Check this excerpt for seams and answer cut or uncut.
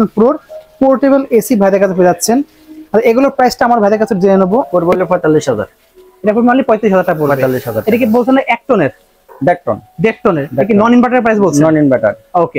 cut